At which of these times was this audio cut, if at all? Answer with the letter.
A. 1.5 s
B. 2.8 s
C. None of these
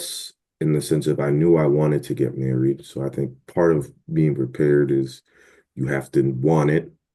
C